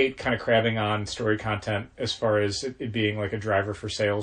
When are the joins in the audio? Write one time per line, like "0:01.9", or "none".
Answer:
none

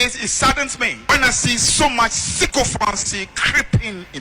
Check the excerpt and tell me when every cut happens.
0:01.1

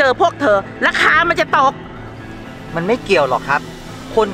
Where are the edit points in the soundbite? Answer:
none

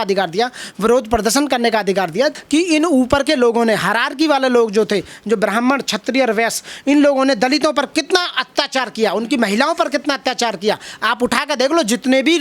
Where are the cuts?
0:02.4

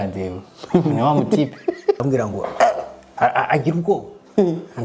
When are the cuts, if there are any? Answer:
0:02.0

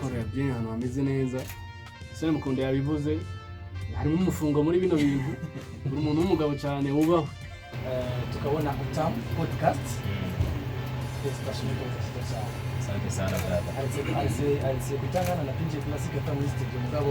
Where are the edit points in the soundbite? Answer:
0:07.8

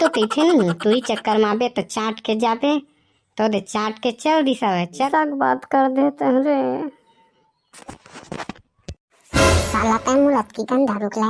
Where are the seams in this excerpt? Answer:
0:05.1

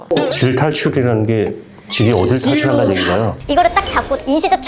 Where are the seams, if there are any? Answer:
0:03.4

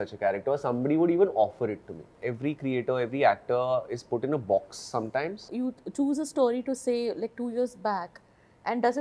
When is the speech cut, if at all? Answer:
0:05.5

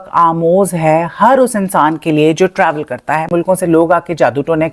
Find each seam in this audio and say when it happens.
0:03.3

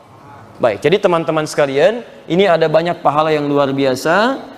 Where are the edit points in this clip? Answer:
none

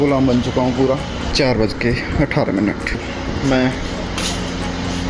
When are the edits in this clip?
0:01.3
0:03.0

